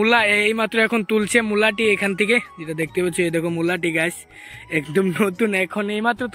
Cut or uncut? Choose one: uncut